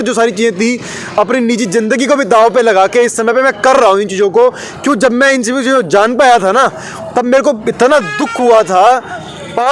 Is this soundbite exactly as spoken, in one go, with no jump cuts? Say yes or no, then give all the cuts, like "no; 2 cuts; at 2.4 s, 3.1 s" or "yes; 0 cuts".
yes; 0 cuts